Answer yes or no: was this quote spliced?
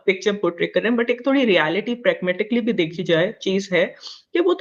no